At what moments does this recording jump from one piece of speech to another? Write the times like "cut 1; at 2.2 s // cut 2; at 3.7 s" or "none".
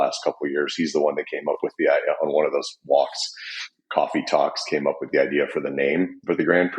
none